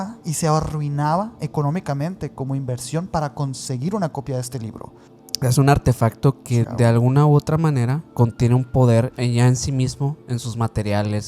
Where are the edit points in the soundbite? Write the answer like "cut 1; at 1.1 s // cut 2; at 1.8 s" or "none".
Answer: cut 1; at 5.1 s // cut 2; at 6.6 s // cut 3; at 8.1 s // cut 4; at 9.2 s

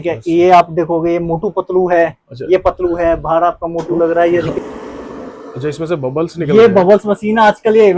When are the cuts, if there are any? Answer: cut 1; at 4.5 s

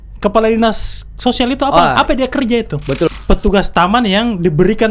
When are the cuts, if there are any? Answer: cut 1; at 3.1 s

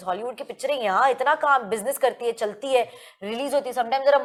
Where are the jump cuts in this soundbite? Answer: none

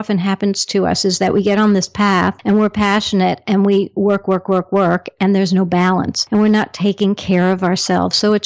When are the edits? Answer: cut 1; at 2.4 s // cut 2; at 6.2 s

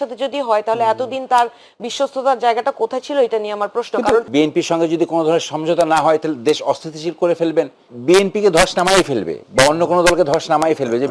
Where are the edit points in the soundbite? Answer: cut 1; at 4.3 s // cut 2; at 7.9 s

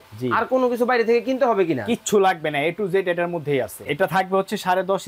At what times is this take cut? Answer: cut 1; at 3.8 s

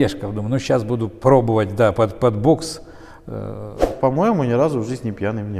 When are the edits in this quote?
cut 1; at 3.9 s

